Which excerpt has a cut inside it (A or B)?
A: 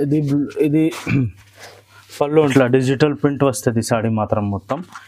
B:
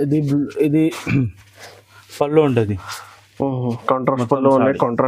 A